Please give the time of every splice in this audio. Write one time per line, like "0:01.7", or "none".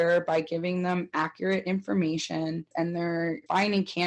0:03.0